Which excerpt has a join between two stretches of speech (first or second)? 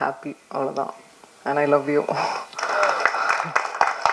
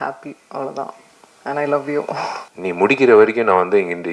second